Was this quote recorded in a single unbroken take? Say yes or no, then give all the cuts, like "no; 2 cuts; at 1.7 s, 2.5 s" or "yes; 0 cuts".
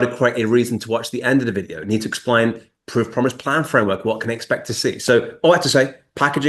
yes; 0 cuts